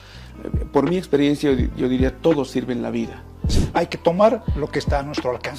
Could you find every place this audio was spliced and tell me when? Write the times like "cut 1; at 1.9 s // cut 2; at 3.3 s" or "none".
cut 1; at 3.6 s